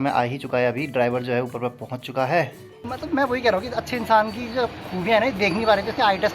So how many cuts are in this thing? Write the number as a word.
one